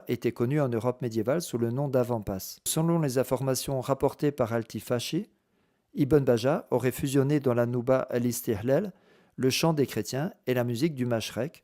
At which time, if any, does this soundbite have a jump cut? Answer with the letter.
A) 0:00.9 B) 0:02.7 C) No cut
B